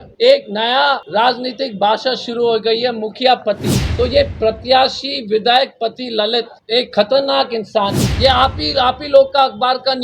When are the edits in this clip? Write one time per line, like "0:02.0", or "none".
0:01.0
0:08.0

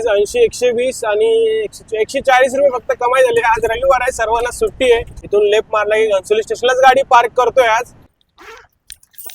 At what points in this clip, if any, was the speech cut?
0:05.1
0:08.1

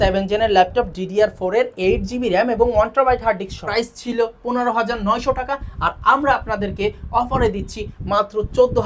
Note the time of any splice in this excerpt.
0:03.6

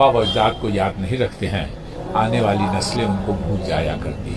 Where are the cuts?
none

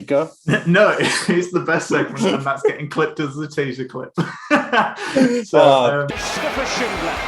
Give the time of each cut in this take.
0:06.1

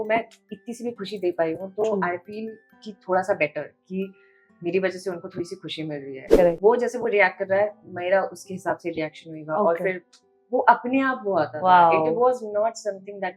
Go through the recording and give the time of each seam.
0:06.2

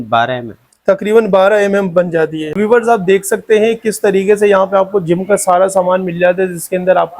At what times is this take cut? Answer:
0:02.6

